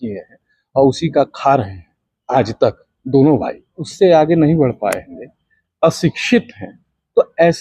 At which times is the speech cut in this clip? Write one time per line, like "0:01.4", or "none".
0:03.8